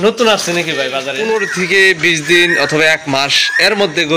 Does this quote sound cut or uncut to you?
cut